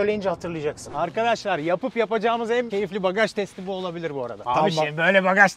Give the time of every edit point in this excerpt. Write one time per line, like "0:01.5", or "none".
0:00.9
0:04.5